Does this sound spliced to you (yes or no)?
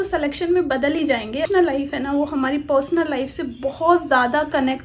yes